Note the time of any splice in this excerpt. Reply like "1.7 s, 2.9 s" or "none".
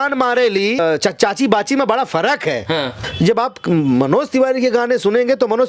0.8 s, 3.0 s